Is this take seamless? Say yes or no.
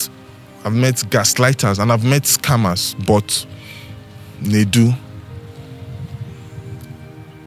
yes